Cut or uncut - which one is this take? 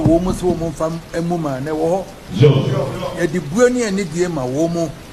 uncut